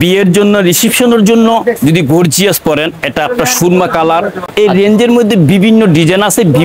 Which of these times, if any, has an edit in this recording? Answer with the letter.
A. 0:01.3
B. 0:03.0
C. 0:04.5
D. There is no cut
C